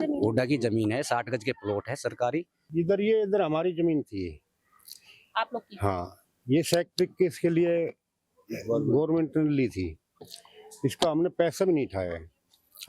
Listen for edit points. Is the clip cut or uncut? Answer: cut